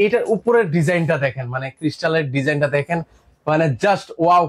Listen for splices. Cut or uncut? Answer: uncut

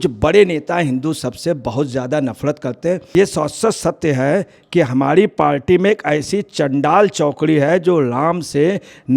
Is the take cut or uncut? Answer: cut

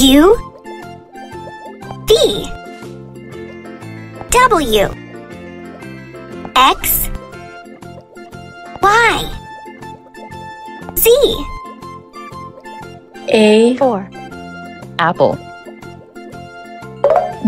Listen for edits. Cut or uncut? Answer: cut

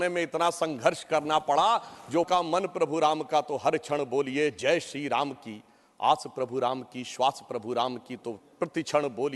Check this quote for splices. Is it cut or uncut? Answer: cut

